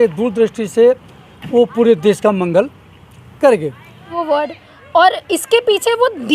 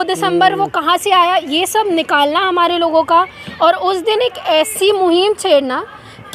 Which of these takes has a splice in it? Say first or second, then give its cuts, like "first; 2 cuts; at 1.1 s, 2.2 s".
first; 1 cut; at 4.1 s